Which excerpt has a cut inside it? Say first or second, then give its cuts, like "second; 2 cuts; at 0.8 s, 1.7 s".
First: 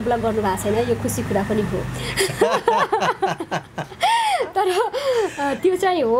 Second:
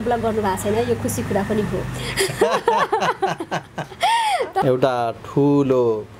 second; 1 cut; at 4.6 s